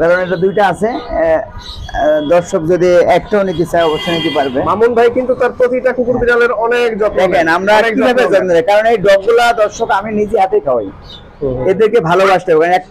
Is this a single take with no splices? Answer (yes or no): yes